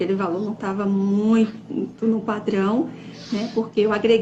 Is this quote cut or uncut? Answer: uncut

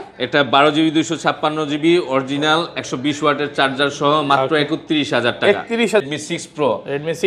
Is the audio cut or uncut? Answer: cut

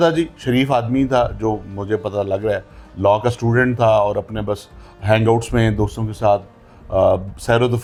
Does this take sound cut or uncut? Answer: uncut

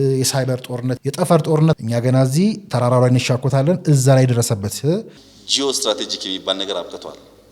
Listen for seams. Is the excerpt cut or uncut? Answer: cut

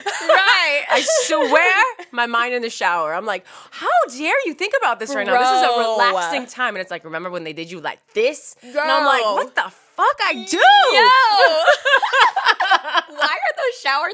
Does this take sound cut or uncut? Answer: uncut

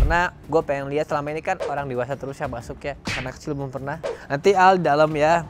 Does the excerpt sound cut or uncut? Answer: cut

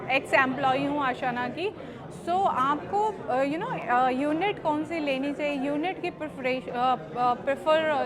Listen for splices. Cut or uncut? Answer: uncut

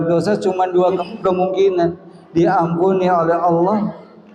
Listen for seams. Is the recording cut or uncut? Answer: cut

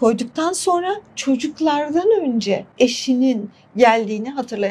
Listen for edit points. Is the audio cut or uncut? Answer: cut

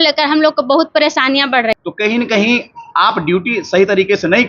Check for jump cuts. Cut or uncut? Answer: cut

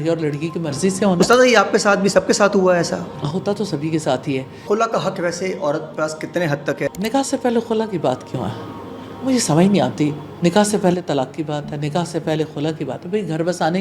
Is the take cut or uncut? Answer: cut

